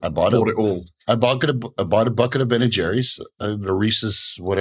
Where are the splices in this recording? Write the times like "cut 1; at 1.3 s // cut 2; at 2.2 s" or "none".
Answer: none